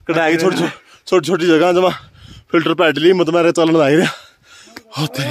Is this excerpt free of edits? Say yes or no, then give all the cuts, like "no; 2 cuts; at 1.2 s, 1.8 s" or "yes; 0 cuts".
yes; 0 cuts